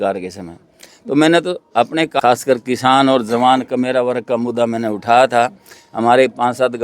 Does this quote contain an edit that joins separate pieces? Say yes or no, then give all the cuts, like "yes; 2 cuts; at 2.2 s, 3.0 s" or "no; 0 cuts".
yes; 1 cut; at 2.2 s